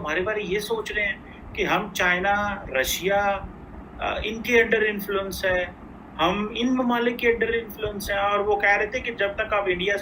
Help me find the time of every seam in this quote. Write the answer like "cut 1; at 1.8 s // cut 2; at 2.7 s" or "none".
none